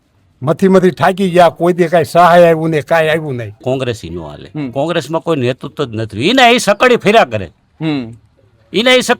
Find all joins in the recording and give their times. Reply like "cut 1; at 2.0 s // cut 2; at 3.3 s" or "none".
cut 1; at 3.5 s